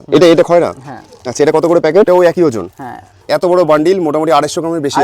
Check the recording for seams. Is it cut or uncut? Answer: cut